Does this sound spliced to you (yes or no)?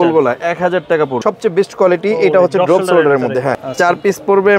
yes